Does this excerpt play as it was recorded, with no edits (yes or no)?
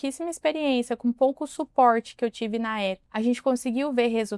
no